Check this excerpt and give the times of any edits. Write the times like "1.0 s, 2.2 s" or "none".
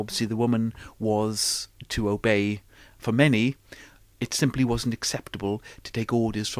2.9 s